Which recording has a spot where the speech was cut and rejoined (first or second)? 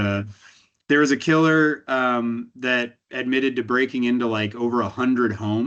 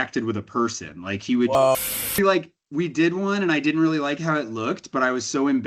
second